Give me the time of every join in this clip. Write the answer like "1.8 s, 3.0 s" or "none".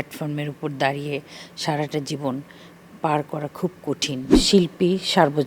4.4 s